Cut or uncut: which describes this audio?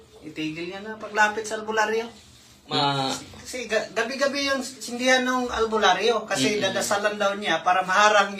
cut